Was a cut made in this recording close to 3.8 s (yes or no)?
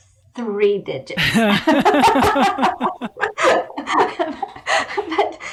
no